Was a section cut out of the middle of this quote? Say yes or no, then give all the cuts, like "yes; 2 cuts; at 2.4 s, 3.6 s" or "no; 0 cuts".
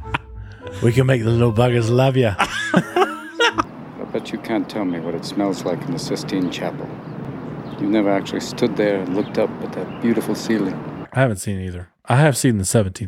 yes; 3 cuts; at 3.7 s, 7.3 s, 11.1 s